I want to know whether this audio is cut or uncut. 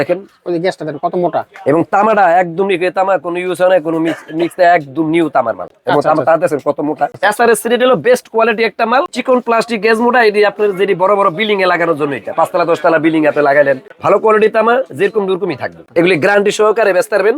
cut